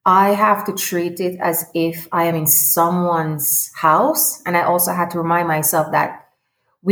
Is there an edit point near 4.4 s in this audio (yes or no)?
no